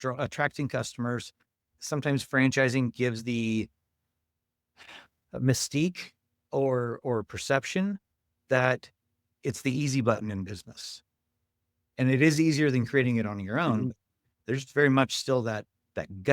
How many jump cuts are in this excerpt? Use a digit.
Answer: 1